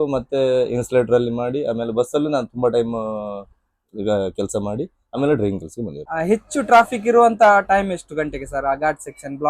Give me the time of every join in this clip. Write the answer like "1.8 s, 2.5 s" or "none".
6.0 s